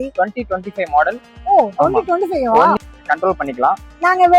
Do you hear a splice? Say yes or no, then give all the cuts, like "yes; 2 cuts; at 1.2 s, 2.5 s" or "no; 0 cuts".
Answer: yes; 1 cut; at 2.8 s